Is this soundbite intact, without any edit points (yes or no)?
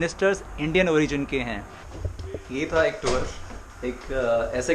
no